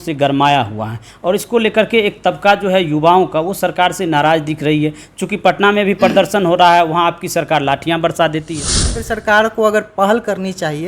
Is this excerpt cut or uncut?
cut